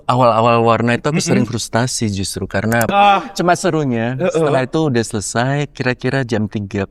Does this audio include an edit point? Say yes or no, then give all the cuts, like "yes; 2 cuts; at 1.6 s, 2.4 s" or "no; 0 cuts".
yes; 1 cut; at 2.9 s